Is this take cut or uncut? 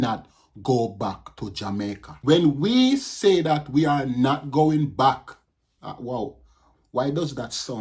cut